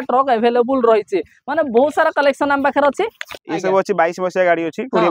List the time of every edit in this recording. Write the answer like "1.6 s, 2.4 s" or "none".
3.1 s